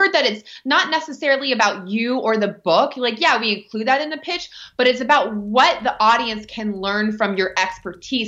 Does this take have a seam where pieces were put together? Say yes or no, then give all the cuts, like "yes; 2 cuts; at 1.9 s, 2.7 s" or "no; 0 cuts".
no; 0 cuts